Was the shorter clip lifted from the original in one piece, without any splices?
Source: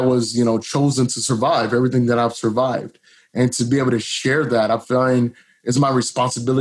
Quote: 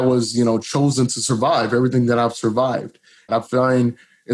no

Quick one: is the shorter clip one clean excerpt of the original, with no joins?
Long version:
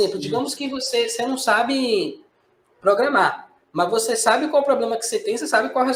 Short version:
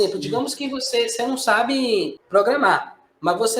no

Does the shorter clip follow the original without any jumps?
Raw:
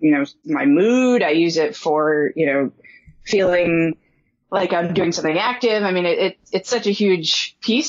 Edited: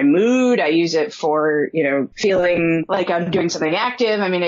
no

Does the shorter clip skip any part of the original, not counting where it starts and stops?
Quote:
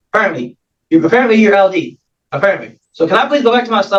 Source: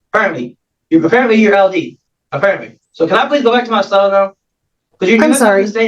no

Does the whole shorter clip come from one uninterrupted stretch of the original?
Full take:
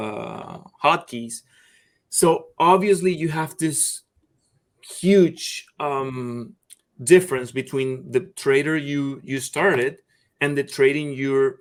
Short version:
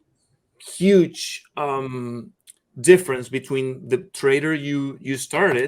yes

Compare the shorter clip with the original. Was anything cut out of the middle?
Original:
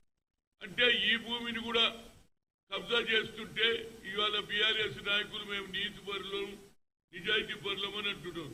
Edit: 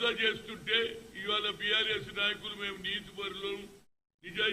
no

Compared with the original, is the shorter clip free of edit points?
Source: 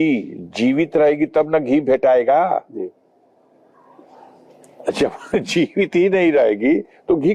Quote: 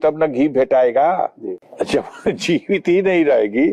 no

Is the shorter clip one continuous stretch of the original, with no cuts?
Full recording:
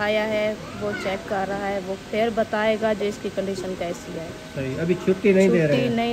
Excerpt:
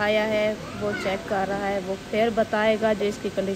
yes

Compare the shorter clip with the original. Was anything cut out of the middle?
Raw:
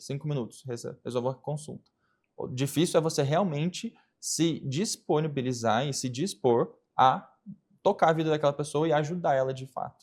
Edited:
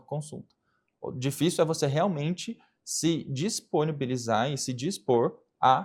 no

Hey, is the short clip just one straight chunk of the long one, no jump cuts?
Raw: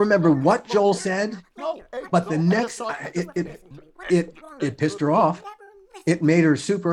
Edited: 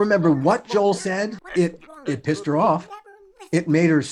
no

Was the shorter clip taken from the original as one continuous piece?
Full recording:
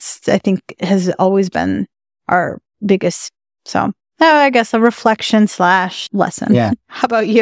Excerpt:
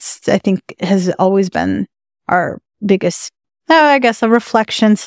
no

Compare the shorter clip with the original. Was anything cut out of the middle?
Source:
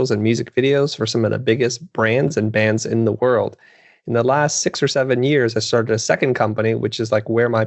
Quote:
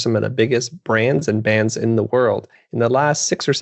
yes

